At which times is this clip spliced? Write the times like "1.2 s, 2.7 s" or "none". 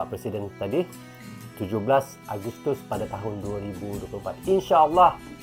none